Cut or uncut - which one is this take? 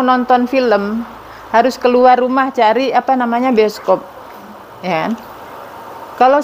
uncut